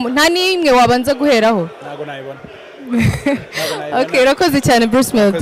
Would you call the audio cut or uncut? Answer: uncut